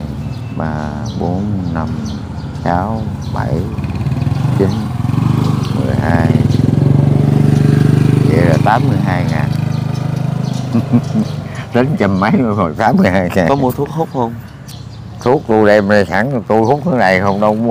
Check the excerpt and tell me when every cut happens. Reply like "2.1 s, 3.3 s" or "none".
none